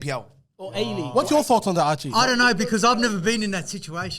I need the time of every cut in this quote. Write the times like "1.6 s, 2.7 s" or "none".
1.1 s, 2.0 s